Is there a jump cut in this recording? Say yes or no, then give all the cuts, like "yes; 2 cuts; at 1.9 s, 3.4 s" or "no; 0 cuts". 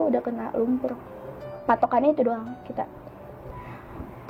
yes; 1 cut; at 1.6 s